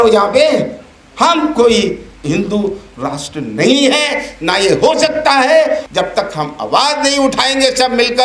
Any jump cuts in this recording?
yes; 2 cuts; at 2.1 s, 5.8 s

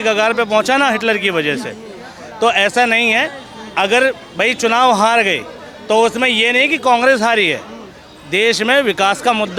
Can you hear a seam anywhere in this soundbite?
no; 0 cuts

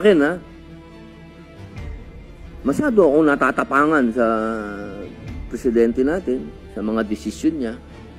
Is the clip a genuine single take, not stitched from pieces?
yes; 0 cuts

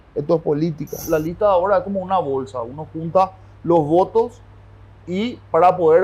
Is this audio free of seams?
no; 1 cut; at 1.0 s

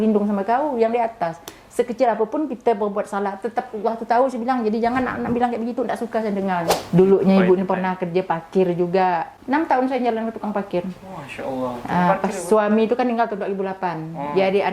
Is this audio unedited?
no; 2 cuts; at 6.8 s, 9.3 s

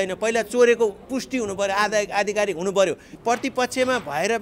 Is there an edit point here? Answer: yes; 1 cut; at 3.1 s

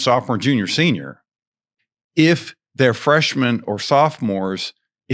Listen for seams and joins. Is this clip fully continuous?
no; 1 cut; at 1.8 s

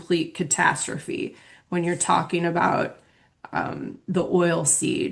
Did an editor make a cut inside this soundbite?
no; 0 cuts

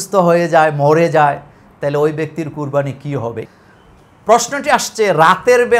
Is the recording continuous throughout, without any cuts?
no; 1 cut; at 3.5 s

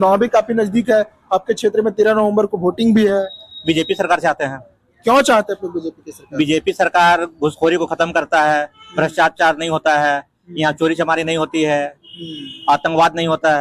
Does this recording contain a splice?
no; 0 cuts

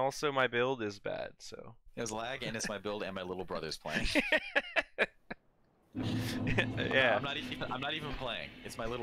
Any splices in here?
no; 0 cuts

